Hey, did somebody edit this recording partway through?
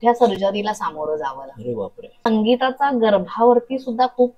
yes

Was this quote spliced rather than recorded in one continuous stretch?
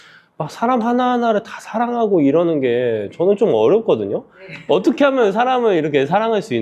no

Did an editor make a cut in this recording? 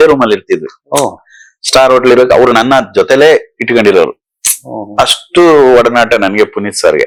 no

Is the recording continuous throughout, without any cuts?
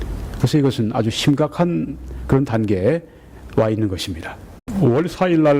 yes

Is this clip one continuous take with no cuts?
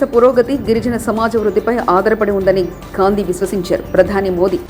yes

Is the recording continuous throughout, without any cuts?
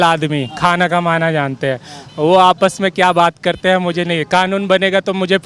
yes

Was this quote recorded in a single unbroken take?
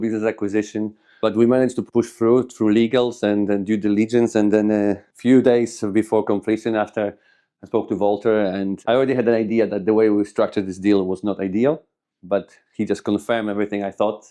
no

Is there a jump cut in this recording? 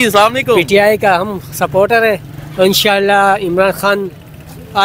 no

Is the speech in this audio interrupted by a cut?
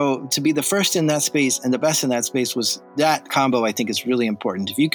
yes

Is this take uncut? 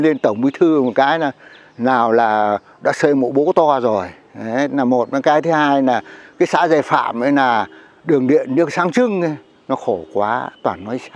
yes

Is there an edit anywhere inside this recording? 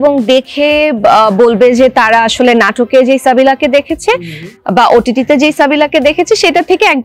no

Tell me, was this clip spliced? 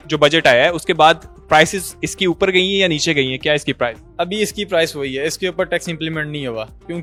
no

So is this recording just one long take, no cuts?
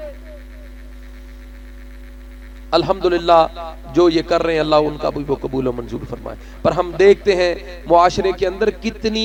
yes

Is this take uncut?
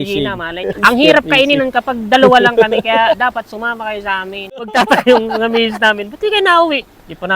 no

